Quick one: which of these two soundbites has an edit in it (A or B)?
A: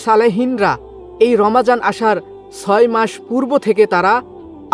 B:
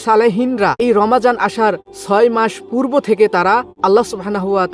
B